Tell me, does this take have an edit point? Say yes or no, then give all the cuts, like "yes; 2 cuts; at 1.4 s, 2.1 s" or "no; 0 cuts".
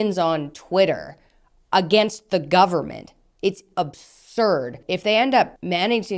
no; 0 cuts